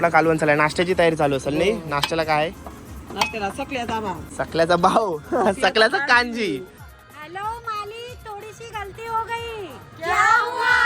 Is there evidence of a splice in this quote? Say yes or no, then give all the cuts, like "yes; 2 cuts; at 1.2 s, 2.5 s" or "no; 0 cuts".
yes; 2 cuts; at 4.3 s, 6.8 s